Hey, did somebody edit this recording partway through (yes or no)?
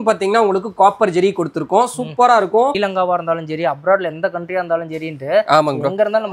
yes